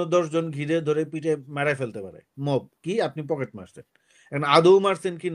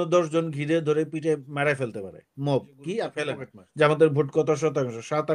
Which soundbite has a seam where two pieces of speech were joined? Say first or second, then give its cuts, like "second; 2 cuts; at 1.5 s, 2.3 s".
second; 1 cut; at 3.6 s